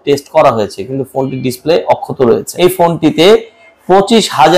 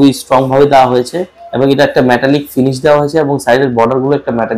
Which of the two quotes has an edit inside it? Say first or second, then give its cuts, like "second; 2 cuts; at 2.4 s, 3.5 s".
first; 1 cut; at 2.5 s